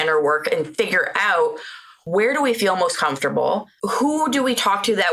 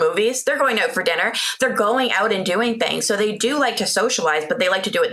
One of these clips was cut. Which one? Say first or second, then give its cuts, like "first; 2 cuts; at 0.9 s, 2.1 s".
first; 2 cuts; at 2.0 s, 3.7 s